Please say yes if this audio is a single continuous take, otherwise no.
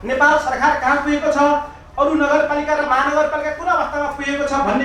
yes